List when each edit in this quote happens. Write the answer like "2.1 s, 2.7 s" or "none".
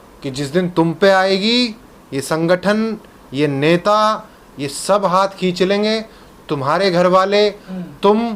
none